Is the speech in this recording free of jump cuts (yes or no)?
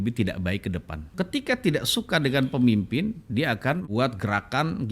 no